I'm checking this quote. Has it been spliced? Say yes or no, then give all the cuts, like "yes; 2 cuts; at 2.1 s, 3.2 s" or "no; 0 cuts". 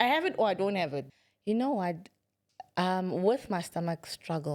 yes; 1 cut; at 1.0 s